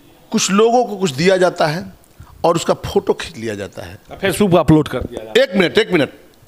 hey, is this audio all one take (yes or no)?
yes